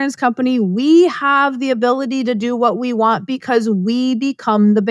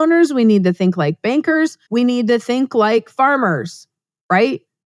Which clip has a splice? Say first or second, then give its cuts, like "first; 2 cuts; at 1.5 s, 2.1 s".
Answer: second; 1 cut; at 1.8 s